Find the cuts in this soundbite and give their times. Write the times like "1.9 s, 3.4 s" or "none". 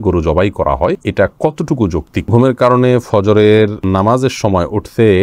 1.0 s, 2.3 s, 3.8 s